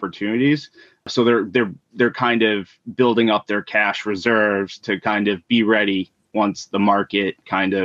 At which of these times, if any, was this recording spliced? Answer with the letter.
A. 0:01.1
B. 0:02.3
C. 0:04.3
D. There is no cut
A